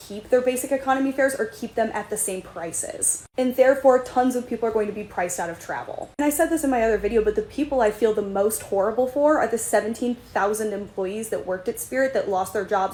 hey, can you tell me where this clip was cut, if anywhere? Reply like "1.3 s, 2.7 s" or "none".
none